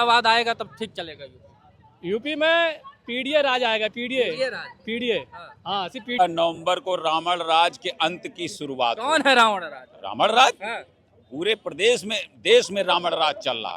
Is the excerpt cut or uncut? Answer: cut